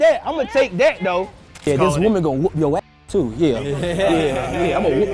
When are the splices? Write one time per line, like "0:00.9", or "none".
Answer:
0:01.4